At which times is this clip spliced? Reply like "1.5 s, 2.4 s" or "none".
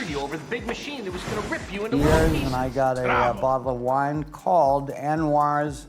1.9 s